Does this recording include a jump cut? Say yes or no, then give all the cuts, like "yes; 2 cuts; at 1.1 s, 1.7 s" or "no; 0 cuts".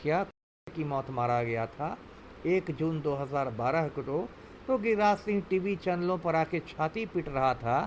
no; 0 cuts